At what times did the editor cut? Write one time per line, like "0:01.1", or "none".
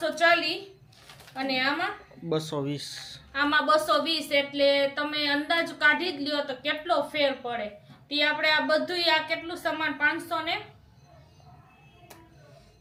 none